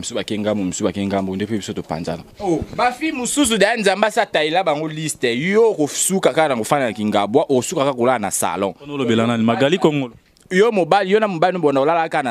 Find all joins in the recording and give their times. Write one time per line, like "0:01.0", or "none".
0:02.3